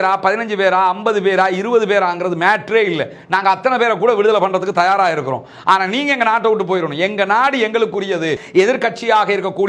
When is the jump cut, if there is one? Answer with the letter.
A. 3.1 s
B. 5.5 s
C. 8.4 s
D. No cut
C